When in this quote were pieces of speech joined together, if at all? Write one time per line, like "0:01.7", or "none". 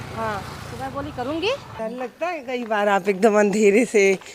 0:01.7

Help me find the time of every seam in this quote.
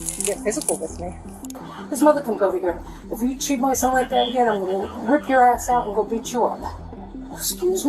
0:01.6

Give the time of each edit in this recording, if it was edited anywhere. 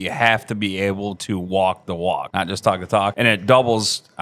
0:02.3
0:03.1

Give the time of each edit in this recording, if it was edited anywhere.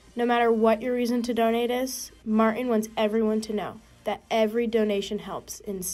none

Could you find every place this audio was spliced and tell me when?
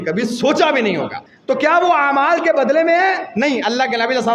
0:01.2

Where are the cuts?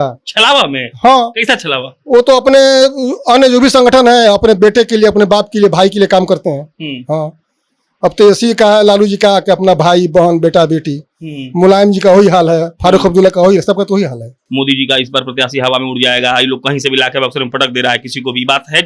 0:14.3

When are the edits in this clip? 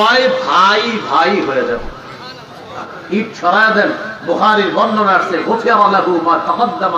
0:02.8

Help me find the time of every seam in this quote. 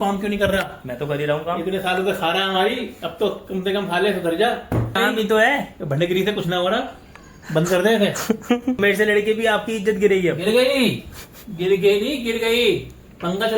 0:05.0
0:08.8

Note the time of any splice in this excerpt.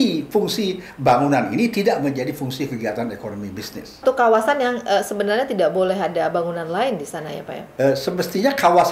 0:04.0

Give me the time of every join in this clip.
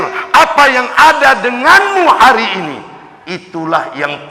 none

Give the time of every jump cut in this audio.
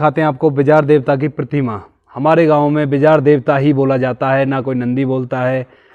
none

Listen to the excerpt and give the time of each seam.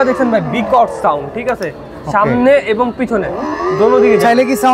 none

